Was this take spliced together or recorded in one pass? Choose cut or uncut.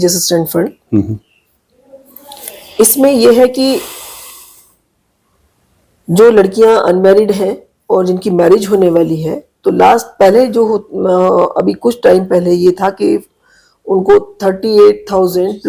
uncut